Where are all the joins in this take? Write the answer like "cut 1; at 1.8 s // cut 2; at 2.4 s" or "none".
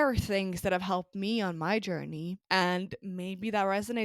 cut 1; at 2.3 s